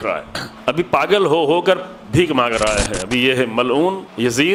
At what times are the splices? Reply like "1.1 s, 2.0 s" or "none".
none